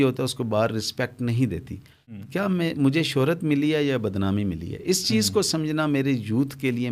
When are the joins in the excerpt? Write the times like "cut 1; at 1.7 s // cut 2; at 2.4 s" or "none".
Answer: cut 1; at 2.2 s